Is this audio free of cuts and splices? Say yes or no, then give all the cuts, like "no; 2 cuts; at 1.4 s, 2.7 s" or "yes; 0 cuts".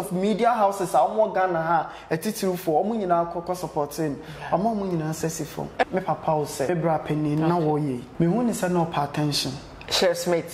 no; 3 cuts; at 5.8 s, 6.7 s, 8.0 s